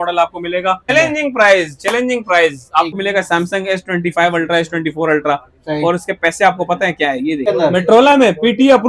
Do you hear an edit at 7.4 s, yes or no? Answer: yes